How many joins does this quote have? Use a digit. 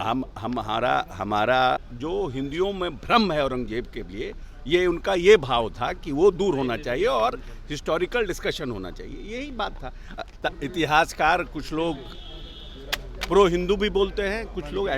2